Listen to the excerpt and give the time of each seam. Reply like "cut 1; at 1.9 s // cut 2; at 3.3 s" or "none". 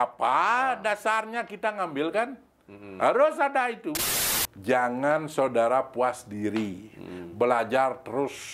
cut 1; at 4.2 s